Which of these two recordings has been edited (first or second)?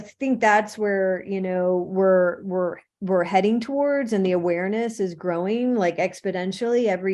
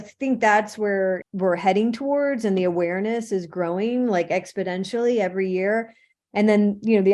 second